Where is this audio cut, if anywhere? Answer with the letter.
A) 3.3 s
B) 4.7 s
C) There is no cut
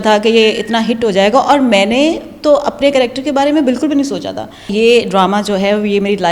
B